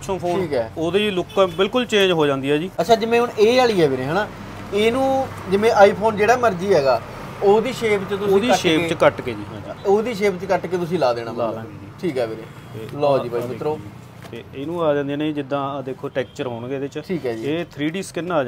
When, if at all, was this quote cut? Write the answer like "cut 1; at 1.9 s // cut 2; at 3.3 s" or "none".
cut 1; at 2.7 s